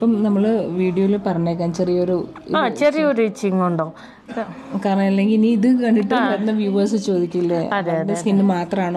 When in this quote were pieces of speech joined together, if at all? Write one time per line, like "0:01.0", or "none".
none